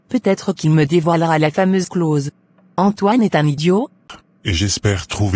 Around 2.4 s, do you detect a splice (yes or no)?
no